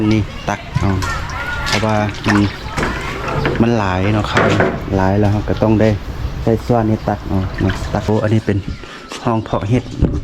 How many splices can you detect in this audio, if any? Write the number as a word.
one